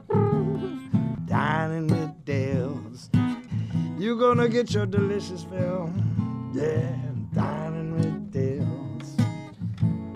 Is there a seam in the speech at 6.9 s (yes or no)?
no